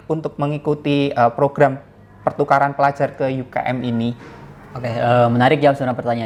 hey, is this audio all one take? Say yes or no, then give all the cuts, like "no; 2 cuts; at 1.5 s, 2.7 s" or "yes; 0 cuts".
yes; 0 cuts